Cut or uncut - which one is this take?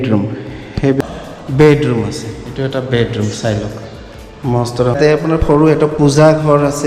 cut